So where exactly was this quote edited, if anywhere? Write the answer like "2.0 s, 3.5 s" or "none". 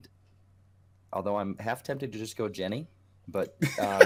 none